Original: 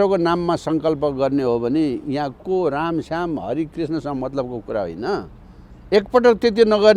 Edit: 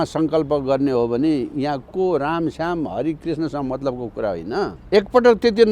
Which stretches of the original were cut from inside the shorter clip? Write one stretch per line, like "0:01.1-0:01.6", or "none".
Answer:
0:05.3-0:05.8